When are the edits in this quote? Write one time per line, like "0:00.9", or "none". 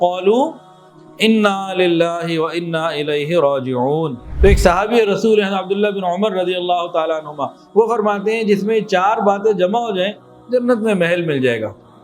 0:04.2